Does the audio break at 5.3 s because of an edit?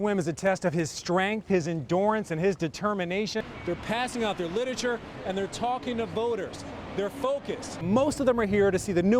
no; 2 cuts; at 3.5 s, 7.8 s

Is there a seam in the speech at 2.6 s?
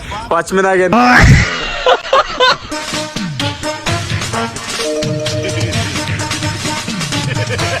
yes; 2 cuts; at 0.9 s, 2.6 s

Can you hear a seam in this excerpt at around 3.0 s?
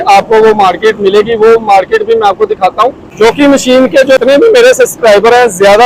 yes; 2 cuts; at 3.0 s, 4.2 s

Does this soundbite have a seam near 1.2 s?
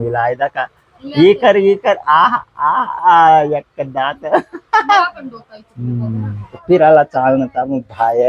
no; 1 cut; at 6.6 s

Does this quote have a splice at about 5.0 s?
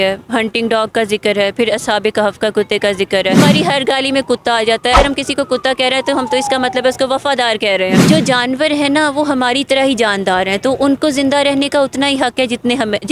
yes; 3 cuts; at 3.4 s, 5.0 s, 8.0 s

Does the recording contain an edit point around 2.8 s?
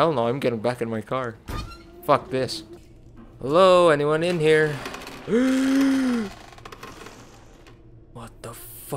yes; 1 cut; at 2.8 s

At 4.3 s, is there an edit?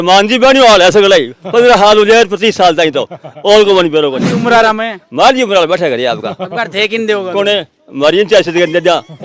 yes; 1 cut; at 4.3 s

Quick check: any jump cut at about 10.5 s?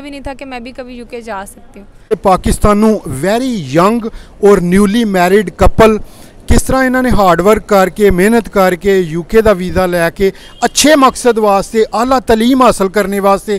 no; 1 cut; at 2.1 s

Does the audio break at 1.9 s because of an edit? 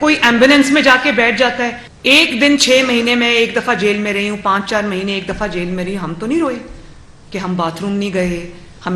yes; 1 cut; at 1.9 s

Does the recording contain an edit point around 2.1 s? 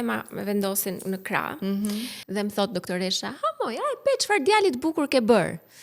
yes; 1 cut; at 2.1 s

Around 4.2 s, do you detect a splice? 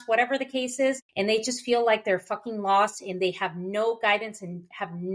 no; 1 cut; at 1.1 s

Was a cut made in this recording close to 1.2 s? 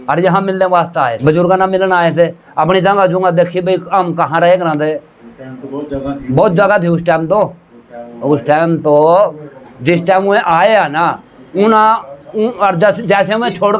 yes; 1 cut; at 1.2 s

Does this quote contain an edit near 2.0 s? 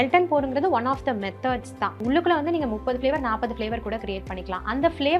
yes; 1 cut; at 2.0 s

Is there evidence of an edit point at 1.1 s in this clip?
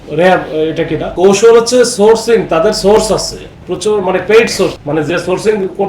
yes; 2 cuts; at 1.1 s, 4.7 s

